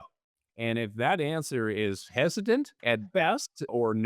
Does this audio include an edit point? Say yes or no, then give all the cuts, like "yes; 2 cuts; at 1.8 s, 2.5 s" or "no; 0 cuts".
yes; 1 cut; at 2.7 s